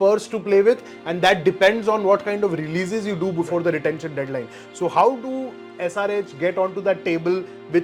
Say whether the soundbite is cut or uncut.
uncut